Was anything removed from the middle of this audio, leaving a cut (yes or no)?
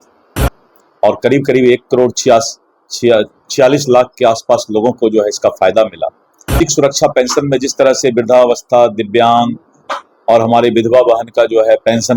yes